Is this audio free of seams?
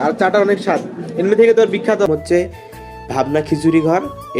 no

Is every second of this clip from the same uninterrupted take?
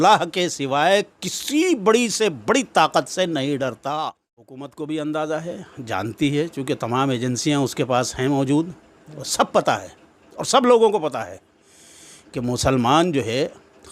no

